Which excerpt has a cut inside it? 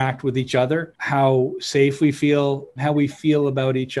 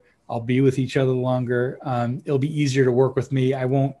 first; 2 cuts; at 1.0 s, 2.8 s

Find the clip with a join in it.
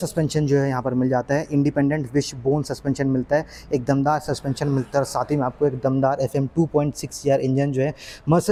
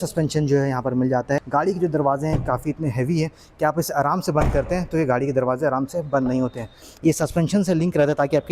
second; 2 cuts; at 1.4 s, 6.8 s

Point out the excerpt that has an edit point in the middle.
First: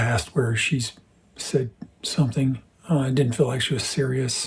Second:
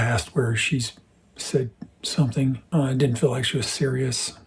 second; 1 cut; at 2.6 s

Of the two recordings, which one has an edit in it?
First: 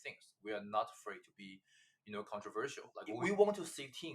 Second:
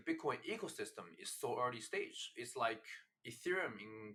first; 1 cut; at 3.0 s

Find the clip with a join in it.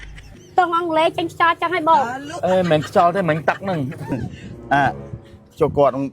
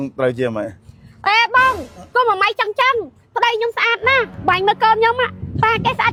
first; 1 cut; at 4.1 s

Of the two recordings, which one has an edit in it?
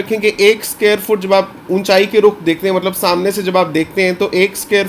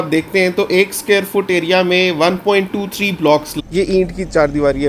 second; 1 cut; at 3.6 s

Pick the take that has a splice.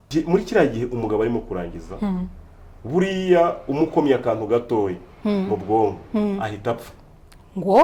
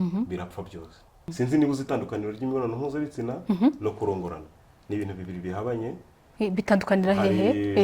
second; 1 cut; at 1.3 s

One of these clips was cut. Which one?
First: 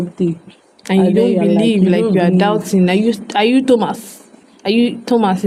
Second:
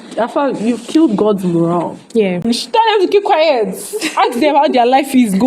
second; 1 cut; at 2.4 s

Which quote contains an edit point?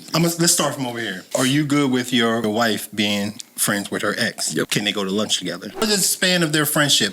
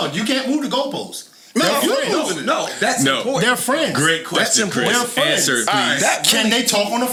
first; 4 cuts; at 1.1 s, 2.4 s, 4.7 s, 5.8 s

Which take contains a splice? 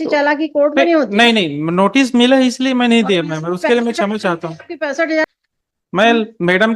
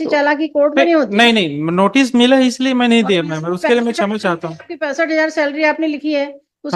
first; 1 cut; at 5.3 s

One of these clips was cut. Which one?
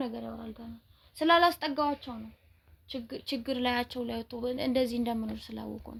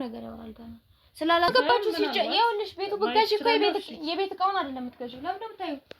second; 1 cut; at 1.5 s

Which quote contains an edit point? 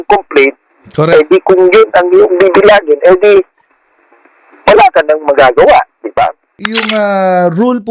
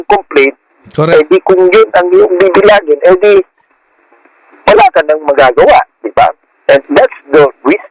first; 1 cut; at 6.5 s

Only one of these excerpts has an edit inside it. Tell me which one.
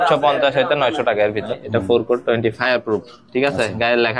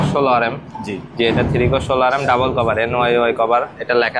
first; 1 cut; at 1.5 s

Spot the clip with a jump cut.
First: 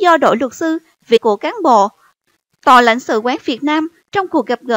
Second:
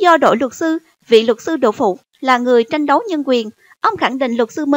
second; 1 cut; at 1.2 s

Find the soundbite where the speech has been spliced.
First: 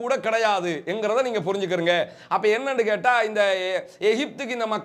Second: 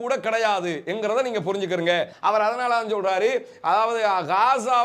second; 1 cut; at 2.1 s

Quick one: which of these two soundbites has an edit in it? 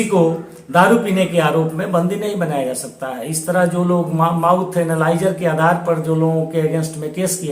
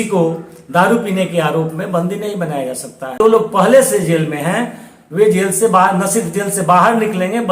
second; 1 cut; at 3.2 s

